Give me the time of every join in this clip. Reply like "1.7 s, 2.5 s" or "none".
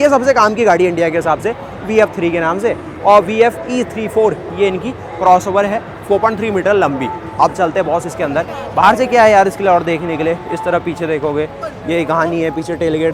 none